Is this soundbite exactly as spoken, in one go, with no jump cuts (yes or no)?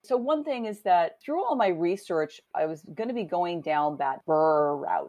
no